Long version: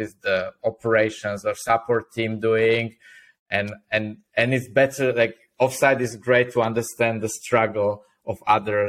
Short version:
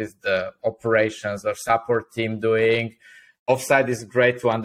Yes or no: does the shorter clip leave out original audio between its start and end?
yes